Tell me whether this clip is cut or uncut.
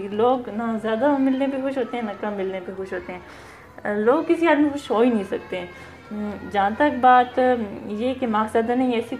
uncut